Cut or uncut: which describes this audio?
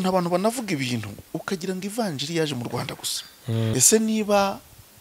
cut